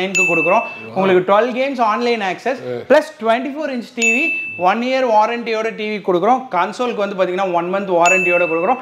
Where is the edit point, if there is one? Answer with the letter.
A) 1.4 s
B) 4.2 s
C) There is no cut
C